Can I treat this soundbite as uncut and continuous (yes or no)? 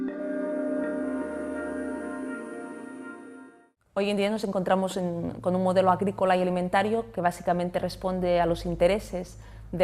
no